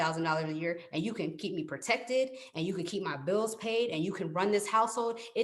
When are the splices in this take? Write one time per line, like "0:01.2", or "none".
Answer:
none